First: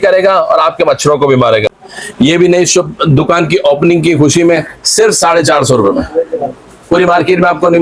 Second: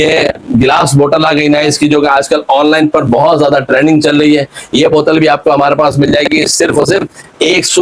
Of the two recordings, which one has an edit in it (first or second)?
first